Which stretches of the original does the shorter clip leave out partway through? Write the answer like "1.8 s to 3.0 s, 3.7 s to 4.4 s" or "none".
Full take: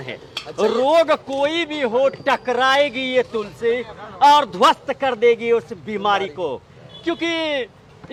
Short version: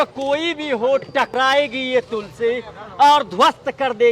2.5 s to 2.6 s